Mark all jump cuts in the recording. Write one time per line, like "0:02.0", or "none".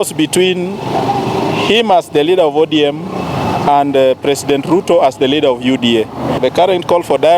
0:06.3